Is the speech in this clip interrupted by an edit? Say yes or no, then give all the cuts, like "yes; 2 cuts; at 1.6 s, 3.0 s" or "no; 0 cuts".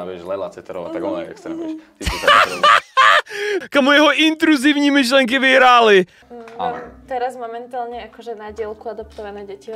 yes; 1 cut; at 6.2 s